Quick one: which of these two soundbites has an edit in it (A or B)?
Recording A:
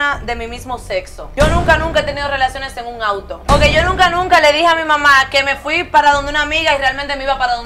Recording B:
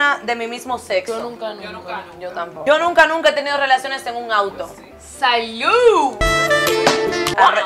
A